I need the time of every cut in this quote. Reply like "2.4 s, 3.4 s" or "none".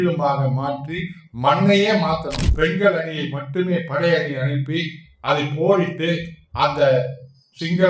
2.4 s